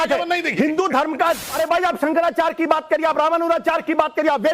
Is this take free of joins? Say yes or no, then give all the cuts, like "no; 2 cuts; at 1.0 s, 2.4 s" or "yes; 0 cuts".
no; 1 cut; at 1.5 s